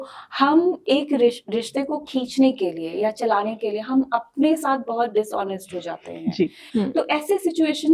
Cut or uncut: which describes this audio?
cut